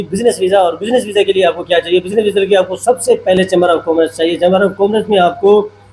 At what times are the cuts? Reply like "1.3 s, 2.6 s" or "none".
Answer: none